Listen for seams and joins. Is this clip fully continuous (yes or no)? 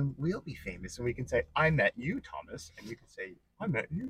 yes